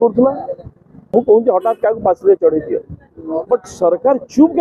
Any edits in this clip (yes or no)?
yes